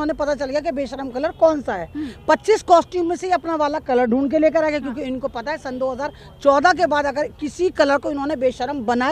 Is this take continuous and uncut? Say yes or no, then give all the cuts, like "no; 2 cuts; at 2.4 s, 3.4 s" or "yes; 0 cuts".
yes; 0 cuts